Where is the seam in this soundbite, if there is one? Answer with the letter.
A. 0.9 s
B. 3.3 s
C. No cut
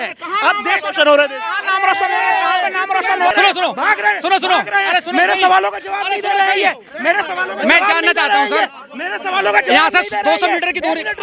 B